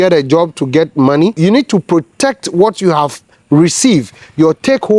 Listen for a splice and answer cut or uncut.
cut